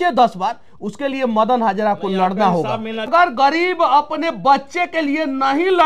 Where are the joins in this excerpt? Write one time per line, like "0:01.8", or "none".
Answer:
0:03.1